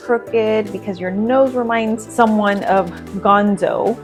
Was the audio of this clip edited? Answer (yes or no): no